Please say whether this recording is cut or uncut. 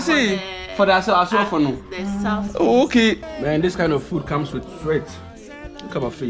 cut